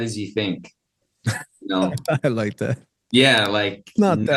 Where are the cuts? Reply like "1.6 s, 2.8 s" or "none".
none